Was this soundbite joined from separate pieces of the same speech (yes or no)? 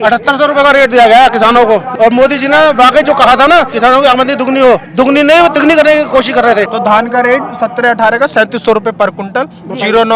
yes